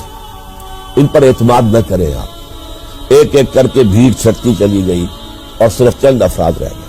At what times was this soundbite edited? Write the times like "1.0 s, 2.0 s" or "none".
2.9 s